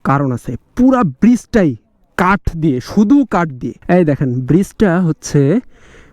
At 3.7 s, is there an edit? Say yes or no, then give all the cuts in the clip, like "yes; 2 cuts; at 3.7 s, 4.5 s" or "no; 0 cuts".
yes; 1 cut; at 3.7 s